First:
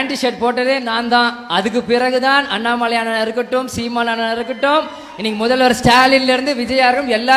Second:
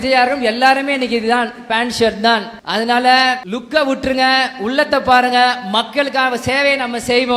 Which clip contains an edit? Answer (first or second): second